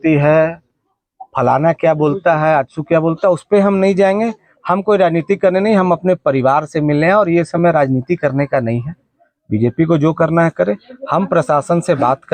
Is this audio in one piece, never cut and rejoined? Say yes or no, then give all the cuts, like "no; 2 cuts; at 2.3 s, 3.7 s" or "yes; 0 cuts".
yes; 0 cuts